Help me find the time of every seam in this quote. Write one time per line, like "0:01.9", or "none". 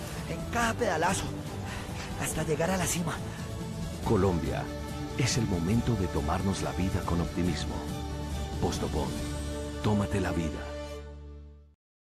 0:03.7

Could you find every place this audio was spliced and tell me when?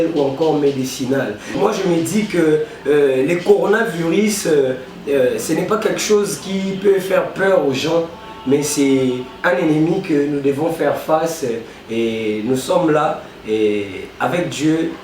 0:01.6

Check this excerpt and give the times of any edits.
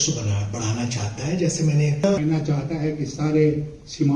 0:02.1

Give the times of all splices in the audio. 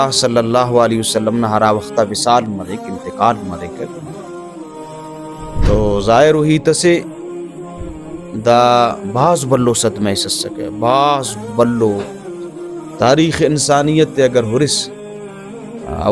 0:03.8
0:05.6

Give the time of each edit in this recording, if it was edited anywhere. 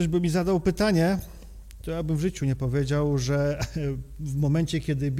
none

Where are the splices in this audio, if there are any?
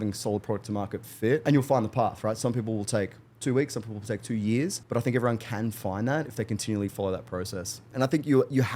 0:01.4
0:04.8
0:07.9

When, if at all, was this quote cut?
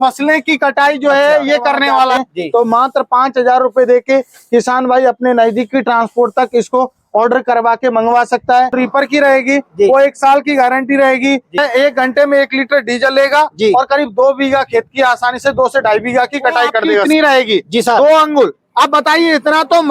0:02.1
0:08.8
0:11.6
0:17.0

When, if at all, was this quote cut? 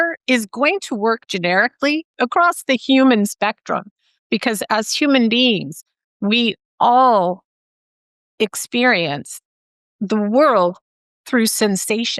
0:02.1

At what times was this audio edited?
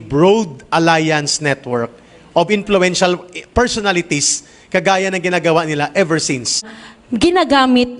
0:06.7

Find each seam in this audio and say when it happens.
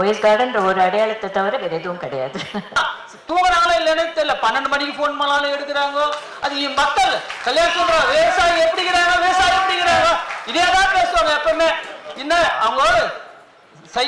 0:02.8

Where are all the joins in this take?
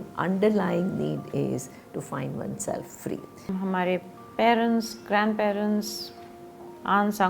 0:03.5

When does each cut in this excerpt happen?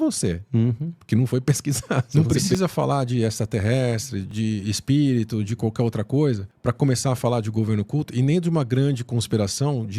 0:02.1
0:04.3
0:06.5

